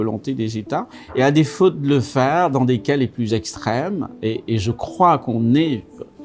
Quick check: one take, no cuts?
no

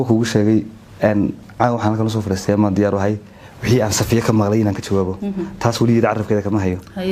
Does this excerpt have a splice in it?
no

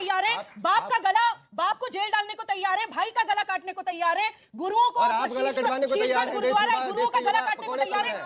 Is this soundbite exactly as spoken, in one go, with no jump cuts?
yes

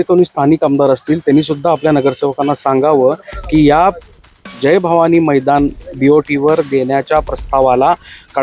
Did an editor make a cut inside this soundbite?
no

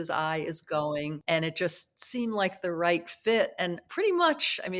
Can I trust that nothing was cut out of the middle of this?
no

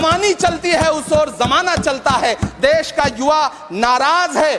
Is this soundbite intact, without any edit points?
yes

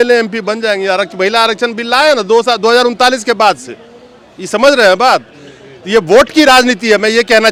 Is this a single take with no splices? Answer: yes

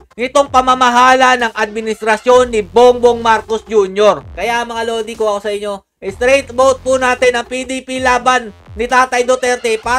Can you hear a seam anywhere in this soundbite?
yes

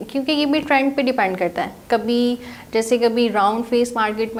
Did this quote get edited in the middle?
no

